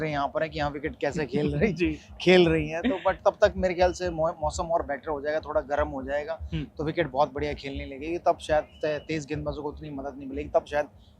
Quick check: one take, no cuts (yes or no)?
yes